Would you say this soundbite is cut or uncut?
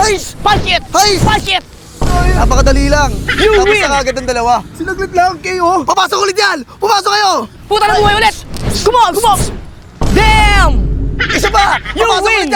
uncut